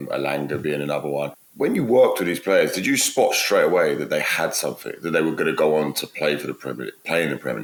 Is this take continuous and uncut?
yes; 0 cuts

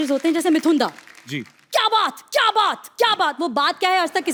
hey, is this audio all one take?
yes; 0 cuts

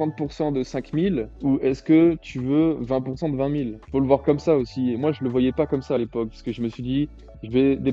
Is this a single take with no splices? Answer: yes; 0 cuts

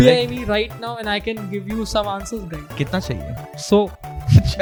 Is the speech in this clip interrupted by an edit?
no; 0 cuts

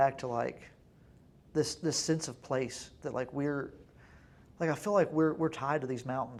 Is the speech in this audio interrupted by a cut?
no; 0 cuts

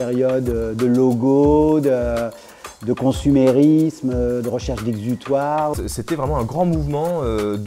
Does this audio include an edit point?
yes; 1 cut; at 5.8 s

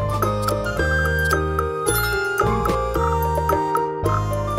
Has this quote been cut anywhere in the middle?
no; 0 cuts

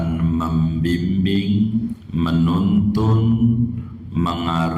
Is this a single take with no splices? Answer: no; 1 cut; at 2.0 s

